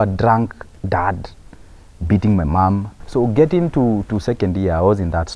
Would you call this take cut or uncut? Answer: cut